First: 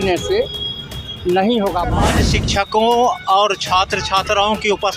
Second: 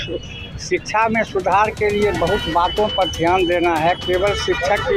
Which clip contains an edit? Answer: first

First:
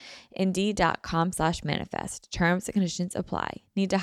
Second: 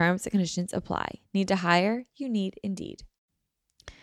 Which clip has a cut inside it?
second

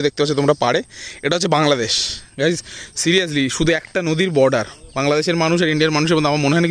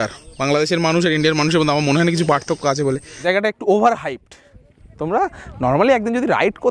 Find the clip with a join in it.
second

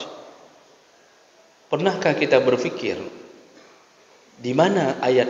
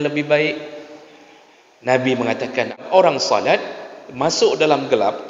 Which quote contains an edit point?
second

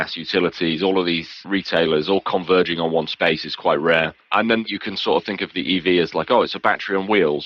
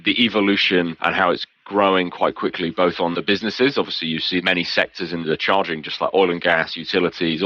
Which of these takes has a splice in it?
second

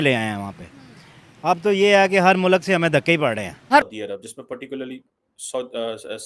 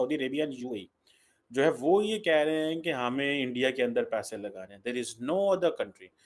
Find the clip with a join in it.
first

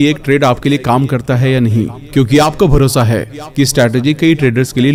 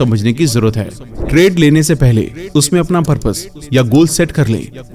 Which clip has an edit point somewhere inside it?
second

